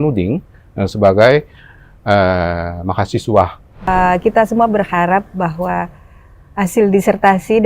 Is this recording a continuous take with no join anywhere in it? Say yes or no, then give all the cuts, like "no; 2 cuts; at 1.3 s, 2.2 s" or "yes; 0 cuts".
no; 1 cut; at 3.9 s